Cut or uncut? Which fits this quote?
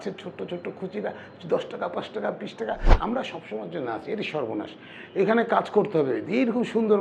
cut